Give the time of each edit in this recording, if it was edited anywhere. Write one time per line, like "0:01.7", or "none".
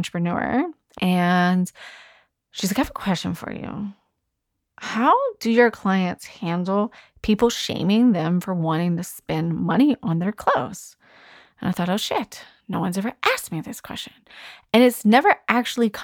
0:00.9